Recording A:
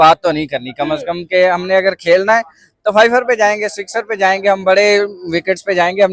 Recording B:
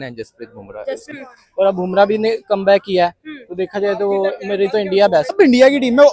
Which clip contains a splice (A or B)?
B